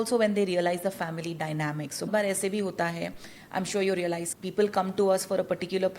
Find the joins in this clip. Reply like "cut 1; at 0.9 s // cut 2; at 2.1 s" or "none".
cut 1; at 2.1 s // cut 2; at 4.3 s

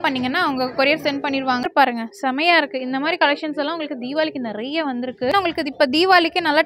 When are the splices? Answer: cut 1; at 1.6 s // cut 2; at 5.3 s

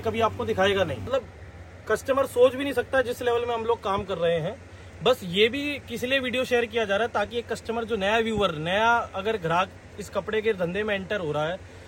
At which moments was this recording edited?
cut 1; at 1.1 s

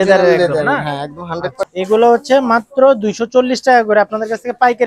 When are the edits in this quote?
cut 1; at 1.7 s

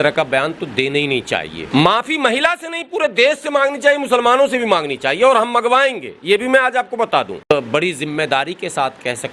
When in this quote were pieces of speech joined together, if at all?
cut 1; at 1.6 s // cut 2; at 7.4 s

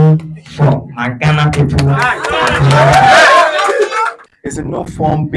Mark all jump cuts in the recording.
cut 1; at 4.2 s

